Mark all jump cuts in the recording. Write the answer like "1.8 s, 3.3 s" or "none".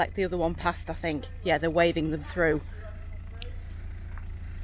none

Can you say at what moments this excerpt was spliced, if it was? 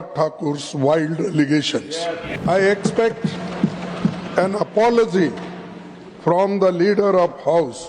2.4 s

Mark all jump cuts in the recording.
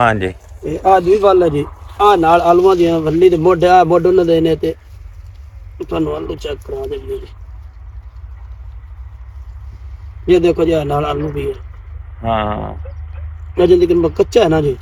none

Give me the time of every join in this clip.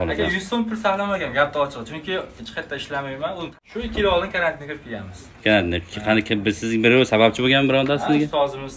3.5 s

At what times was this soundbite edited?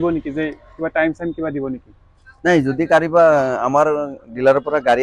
none

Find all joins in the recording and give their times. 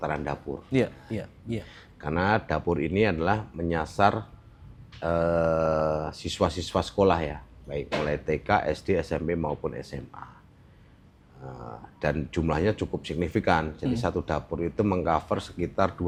none

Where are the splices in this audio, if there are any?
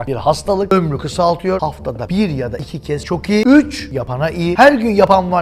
1.6 s

